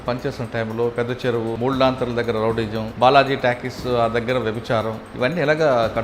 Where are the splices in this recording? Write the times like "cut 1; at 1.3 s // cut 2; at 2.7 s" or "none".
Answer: cut 1; at 1.5 s // cut 2; at 2.9 s // cut 3; at 5.0 s